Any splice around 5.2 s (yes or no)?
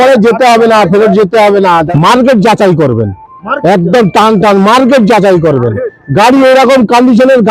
no